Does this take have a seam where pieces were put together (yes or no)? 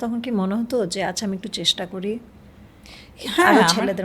no